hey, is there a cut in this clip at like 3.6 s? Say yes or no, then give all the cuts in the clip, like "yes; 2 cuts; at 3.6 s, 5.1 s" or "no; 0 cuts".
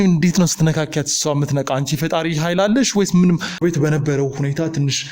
yes; 1 cut; at 3.6 s